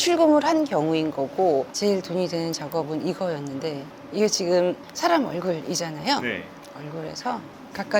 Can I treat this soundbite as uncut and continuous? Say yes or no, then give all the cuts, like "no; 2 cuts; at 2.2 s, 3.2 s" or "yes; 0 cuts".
no; 2 cuts; at 1.7 s, 6.5 s